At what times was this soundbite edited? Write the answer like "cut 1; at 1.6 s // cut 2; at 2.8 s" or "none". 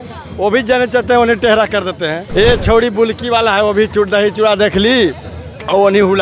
cut 1; at 2.2 s